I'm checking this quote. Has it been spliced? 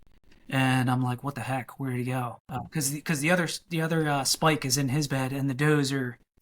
yes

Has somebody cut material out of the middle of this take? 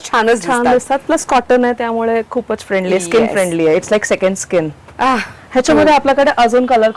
no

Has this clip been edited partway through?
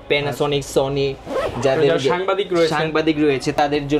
no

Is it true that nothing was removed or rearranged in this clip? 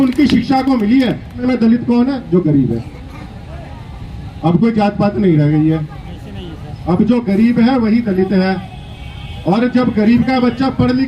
no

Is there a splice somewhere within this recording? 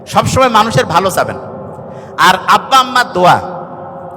no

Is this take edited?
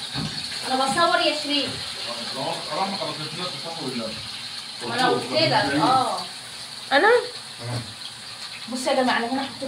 no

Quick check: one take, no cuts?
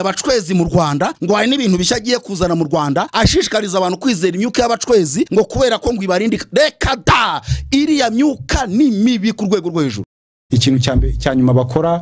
no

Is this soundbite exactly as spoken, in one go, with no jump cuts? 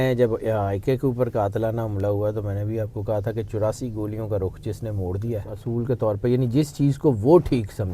no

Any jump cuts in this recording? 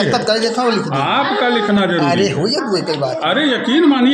no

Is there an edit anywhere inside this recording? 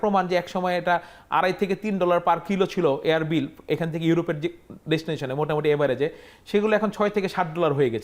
no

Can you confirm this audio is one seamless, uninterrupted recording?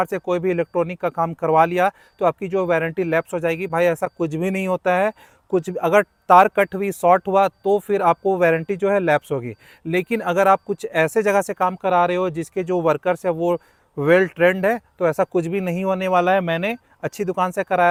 yes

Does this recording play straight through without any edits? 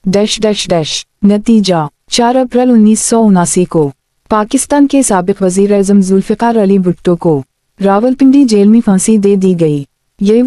no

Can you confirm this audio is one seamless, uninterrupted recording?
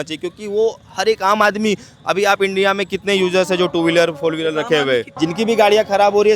no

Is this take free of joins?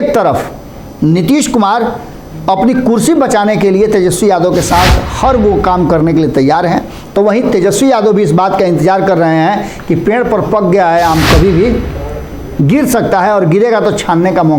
yes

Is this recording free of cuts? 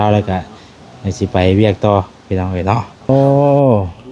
no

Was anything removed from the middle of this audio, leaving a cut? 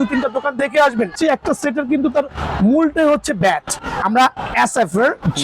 yes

